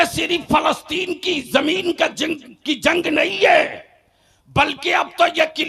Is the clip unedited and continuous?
yes; 0 cuts

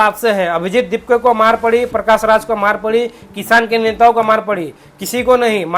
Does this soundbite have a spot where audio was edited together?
no; 0 cuts

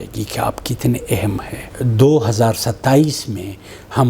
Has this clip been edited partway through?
yes; 1 cut; at 1.7 s

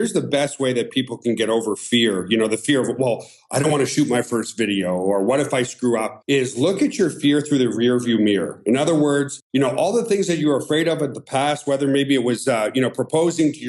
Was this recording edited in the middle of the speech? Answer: no; 0 cuts

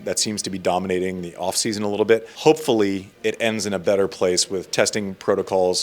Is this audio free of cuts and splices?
no; 1 cut; at 2.3 s

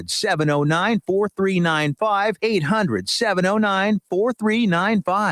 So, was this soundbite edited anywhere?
yes; 1 cut; at 2.3 s

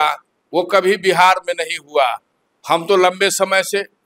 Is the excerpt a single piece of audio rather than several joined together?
yes; 0 cuts

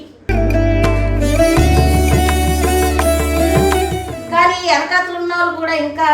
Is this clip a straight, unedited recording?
no; 1 cut; at 4.2 s

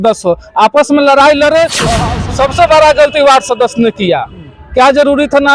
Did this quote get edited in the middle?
yes; 1 cut; at 2.4 s

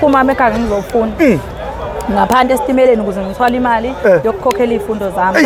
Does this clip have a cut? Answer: no; 0 cuts

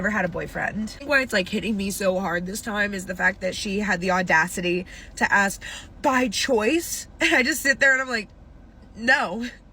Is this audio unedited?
no; 1 cut; at 0.9 s

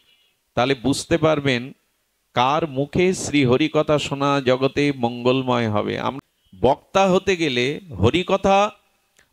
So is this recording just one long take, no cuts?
no; 1 cut; at 6.1 s

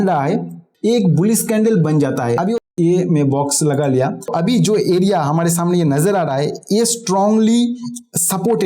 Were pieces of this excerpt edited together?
yes; 1 cut; at 2.6 s

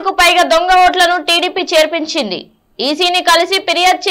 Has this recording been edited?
no; 0 cuts

